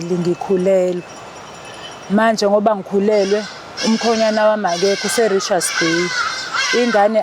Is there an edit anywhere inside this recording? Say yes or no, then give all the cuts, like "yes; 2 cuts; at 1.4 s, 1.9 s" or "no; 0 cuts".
no; 0 cuts